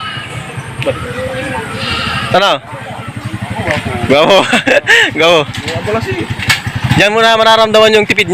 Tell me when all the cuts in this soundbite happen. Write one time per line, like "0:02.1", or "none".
0:01.0